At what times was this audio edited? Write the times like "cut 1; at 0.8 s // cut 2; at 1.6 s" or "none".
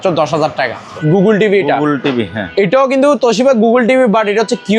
cut 1; at 0.9 s